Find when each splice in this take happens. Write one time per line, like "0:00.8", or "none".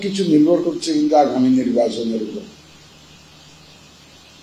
none

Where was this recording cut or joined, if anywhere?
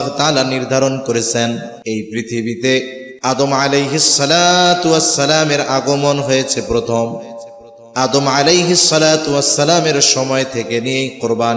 0:01.7
0:03.0

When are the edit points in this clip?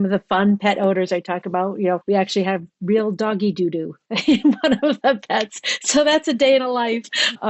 0:02.0

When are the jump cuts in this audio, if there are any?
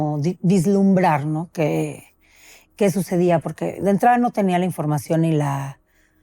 none

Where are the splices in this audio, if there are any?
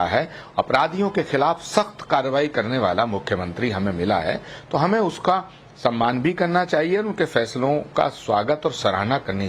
0:02.3

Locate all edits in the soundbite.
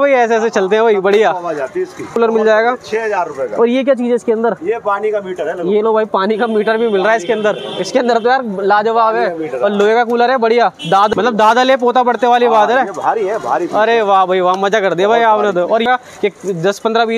0:02.1
0:11.1
0:15.9

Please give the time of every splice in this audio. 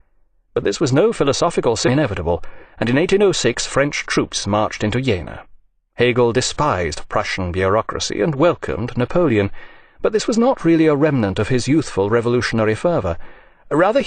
none

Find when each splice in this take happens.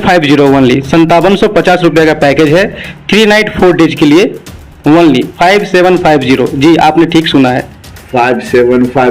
none

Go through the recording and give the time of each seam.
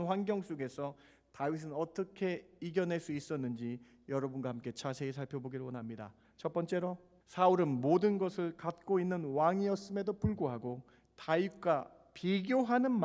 0:06.2
0:07.1

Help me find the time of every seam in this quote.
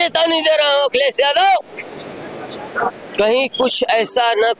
none

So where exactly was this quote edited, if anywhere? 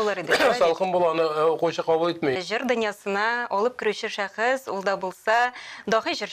0:02.4

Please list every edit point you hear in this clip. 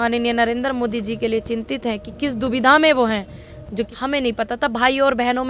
0:03.9

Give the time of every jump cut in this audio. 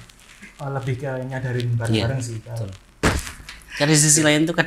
0:03.0

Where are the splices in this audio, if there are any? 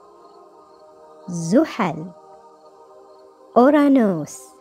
none

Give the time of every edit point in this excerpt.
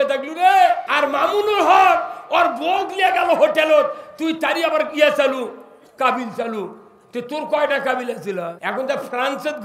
0:00.9
0:08.6

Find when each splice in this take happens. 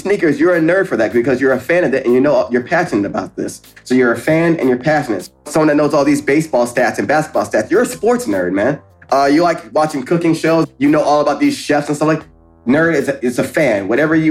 0:05.3
0:10.6
0:12.5

